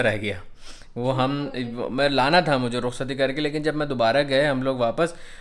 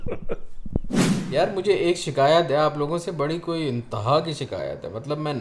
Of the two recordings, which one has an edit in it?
second; 1 cut; at 1.0 s

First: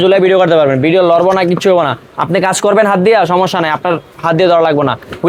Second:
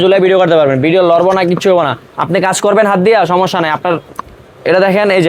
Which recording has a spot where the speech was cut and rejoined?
second; 1 cut; at 4.2 s

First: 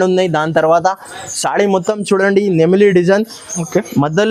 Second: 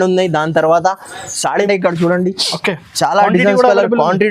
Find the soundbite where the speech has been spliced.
second; 1 cut; at 1.7 s

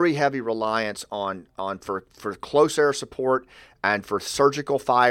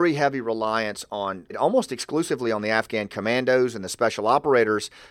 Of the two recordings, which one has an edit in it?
second; 1 cut; at 1.6 s

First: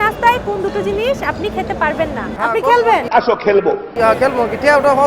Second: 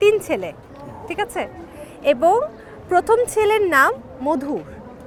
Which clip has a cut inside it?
first; 2 cuts; at 2.4 s, 4.0 s

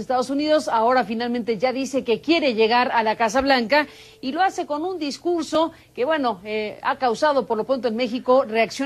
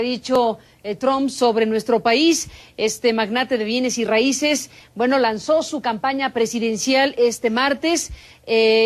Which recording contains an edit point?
second; 1 cut; at 5.2 s

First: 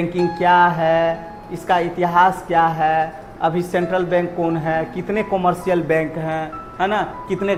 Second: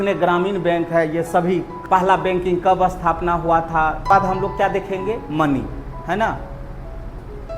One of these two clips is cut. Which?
second; 2 cuts; at 1.7 s, 4.1 s

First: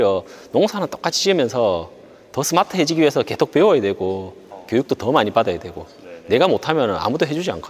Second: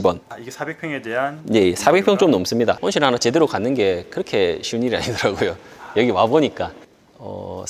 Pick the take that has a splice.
second; 2 cuts; at 2.8 s, 6.8 s

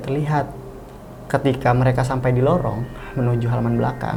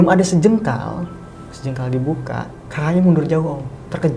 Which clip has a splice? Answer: second; 1 cut; at 2.6 s

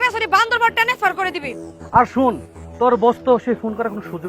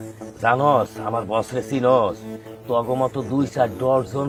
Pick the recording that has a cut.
first; 1 cut; at 1.7 s

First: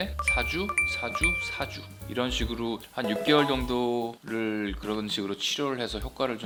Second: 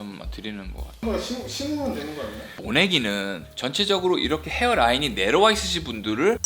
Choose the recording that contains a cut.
second; 1 cut; at 1.0 s

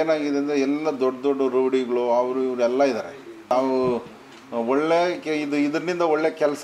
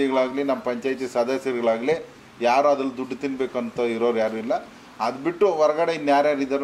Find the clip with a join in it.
first; 1 cut; at 3.5 s

